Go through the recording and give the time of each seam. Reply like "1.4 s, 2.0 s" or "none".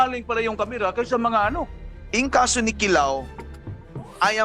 1.8 s